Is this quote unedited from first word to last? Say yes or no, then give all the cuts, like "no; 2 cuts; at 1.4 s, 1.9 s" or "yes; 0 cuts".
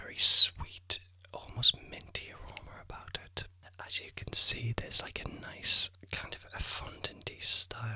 no; 2 cuts; at 3.6 s, 5.8 s